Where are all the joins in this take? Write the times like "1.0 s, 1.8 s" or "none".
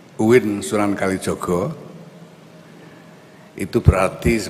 none